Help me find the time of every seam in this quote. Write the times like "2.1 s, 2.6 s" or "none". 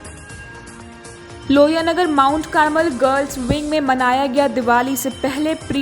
none